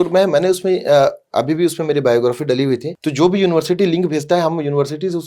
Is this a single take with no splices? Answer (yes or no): no